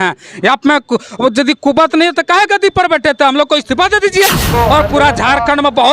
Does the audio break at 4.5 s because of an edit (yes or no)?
yes